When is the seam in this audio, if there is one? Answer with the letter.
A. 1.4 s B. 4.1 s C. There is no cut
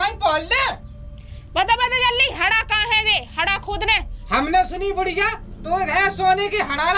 B